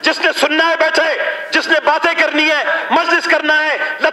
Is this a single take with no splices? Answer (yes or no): yes